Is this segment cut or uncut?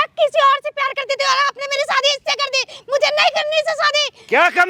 uncut